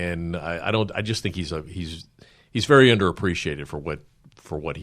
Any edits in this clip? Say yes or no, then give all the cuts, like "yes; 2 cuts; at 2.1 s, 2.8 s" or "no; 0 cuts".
no; 0 cuts